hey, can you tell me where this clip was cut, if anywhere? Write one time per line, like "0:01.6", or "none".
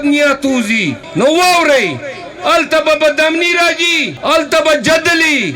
0:01.0
0:04.1